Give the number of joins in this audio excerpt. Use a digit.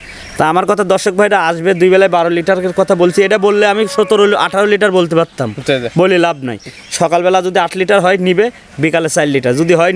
0